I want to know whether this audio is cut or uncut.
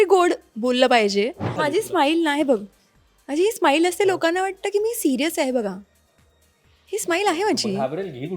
cut